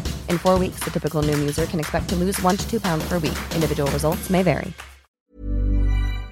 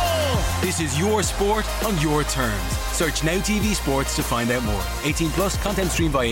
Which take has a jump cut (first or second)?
first